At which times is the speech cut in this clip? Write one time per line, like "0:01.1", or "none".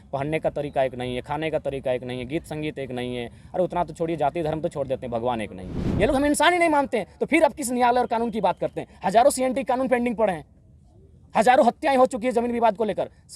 0:05.8